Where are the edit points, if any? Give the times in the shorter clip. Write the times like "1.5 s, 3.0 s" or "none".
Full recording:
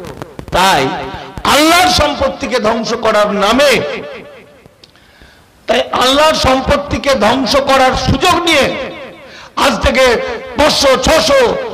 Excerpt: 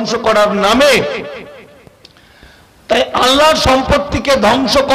none